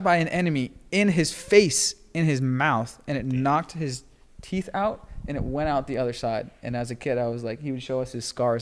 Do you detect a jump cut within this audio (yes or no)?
no